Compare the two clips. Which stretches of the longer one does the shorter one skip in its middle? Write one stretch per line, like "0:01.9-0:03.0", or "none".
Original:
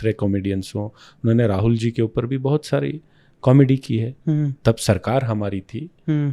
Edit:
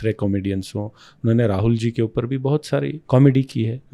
0:03.0-0:03.3